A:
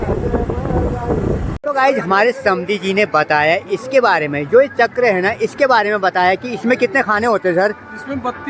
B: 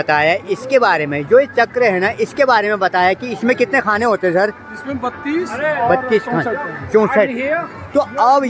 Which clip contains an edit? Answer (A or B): A